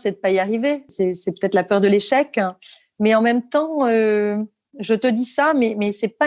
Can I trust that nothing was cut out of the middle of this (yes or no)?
no